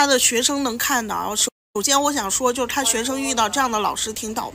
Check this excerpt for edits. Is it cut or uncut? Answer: uncut